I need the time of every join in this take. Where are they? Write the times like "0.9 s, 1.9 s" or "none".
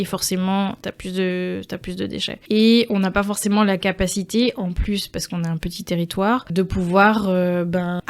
none